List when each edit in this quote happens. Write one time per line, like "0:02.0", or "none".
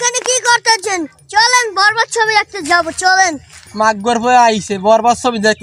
none

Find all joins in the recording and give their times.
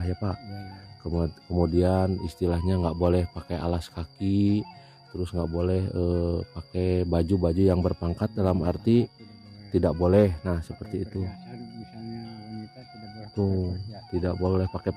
none

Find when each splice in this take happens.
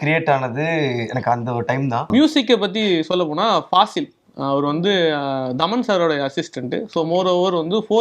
0:02.1

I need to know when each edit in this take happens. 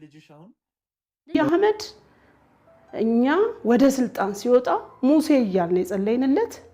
0:01.3

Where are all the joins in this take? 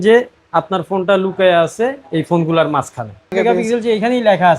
0:03.3

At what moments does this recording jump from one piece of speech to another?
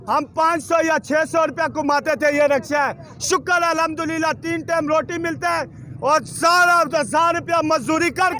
none

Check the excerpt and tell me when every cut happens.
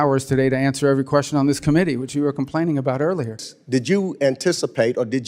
0:03.5

